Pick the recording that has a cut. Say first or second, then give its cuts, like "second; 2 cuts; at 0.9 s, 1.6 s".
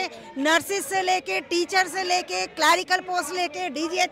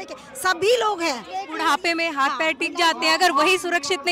second; 1 cut; at 1.4 s